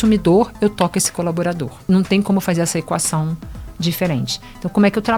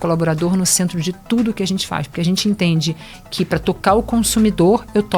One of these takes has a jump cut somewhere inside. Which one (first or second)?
first